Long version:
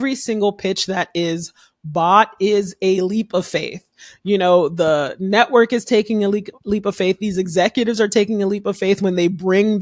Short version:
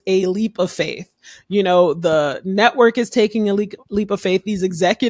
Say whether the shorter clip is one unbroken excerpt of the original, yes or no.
yes